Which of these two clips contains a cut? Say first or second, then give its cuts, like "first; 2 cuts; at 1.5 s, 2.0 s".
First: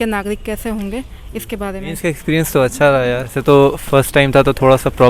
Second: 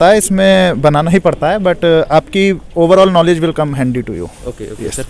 first; 2 cuts; at 2.0 s, 3.3 s